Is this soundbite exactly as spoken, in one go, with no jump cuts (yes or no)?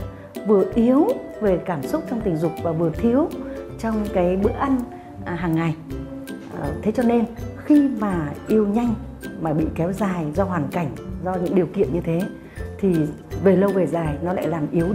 yes